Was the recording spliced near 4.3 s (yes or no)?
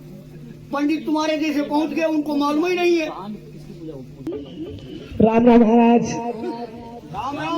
yes